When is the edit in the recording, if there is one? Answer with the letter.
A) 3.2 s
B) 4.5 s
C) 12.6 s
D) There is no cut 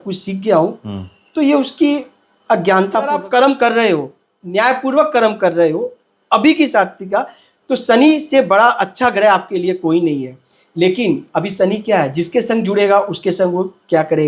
A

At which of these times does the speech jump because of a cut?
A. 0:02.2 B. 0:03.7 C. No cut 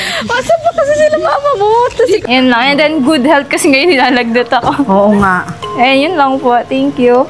A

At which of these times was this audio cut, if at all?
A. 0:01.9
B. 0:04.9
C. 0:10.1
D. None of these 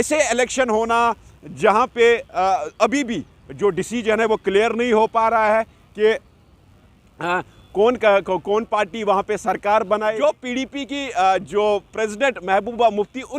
C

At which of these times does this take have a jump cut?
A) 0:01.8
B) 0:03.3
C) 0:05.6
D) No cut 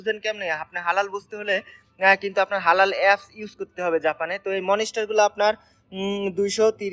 D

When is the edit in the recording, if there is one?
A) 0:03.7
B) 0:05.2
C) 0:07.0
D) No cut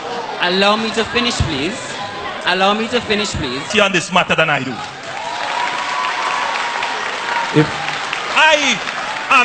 A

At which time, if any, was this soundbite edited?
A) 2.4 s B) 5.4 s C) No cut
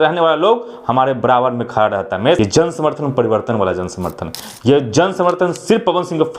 A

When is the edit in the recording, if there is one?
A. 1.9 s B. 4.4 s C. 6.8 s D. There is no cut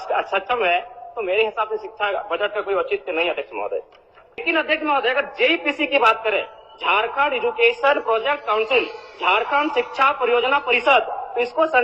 B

